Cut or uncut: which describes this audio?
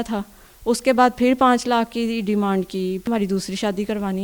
cut